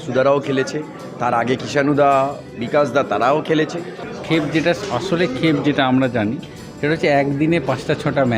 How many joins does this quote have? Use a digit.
1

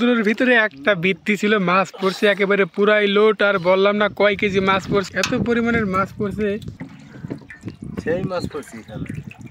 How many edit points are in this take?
0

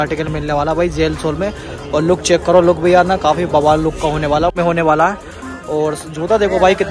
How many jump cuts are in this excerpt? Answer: 1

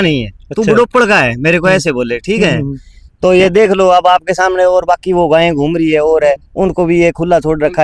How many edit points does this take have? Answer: 0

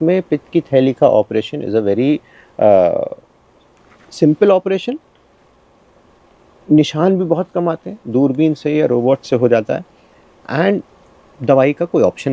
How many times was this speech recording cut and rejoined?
0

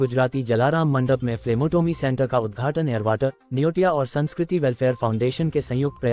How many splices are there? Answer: 0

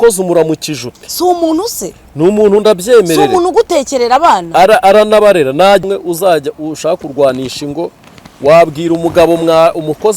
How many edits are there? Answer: 1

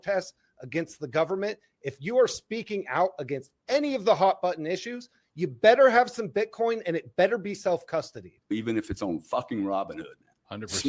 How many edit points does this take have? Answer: 1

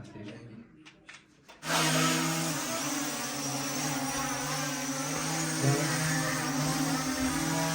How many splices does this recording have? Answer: 1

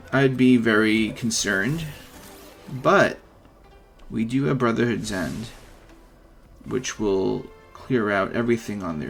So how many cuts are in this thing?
0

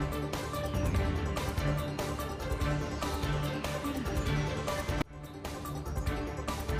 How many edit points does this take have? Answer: 1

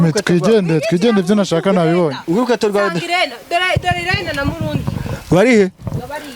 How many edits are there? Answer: 0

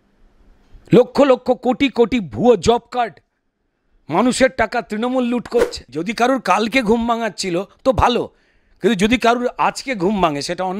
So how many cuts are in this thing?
1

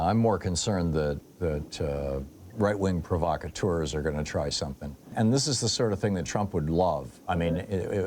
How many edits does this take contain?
1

